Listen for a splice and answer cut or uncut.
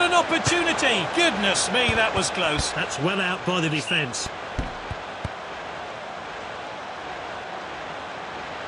uncut